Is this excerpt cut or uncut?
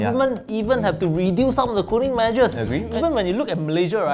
cut